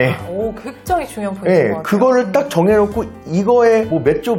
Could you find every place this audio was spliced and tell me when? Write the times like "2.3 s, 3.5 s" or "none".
none